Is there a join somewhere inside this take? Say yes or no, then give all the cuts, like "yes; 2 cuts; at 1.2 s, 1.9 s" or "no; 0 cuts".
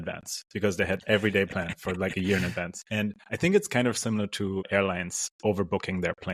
yes; 2 cuts; at 2.8 s, 4.7 s